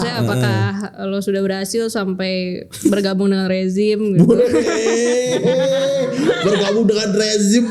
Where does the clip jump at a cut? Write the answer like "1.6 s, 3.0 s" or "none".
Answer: none